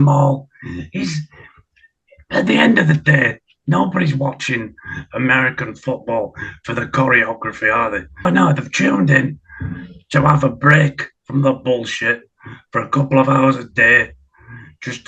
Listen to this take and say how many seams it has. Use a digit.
1